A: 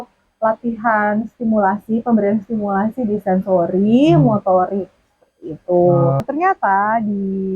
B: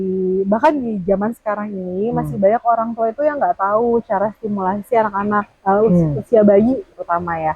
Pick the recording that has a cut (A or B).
A